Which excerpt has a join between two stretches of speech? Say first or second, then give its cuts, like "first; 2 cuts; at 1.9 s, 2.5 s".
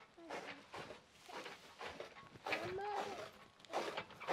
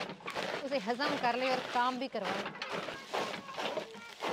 second; 1 cut; at 3.0 s